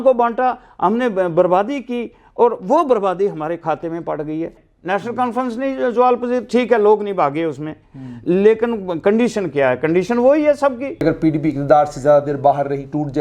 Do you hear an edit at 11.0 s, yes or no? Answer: yes